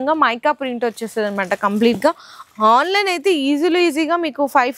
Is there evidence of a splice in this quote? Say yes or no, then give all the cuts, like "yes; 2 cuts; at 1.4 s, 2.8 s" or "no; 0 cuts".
no; 0 cuts